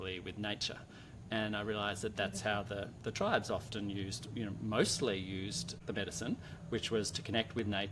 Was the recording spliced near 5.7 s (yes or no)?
yes